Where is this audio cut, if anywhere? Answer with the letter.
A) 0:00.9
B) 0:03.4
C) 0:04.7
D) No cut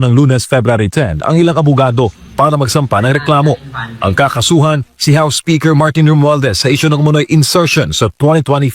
D